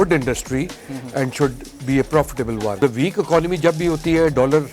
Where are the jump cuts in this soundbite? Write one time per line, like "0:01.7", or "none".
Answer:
0:02.8